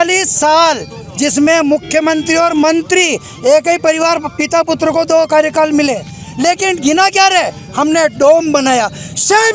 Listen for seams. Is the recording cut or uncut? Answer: uncut